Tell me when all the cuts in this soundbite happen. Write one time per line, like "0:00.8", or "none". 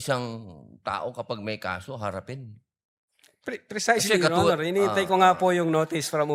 none